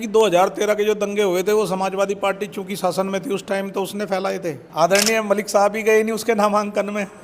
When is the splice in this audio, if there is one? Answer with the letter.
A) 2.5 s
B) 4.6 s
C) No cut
B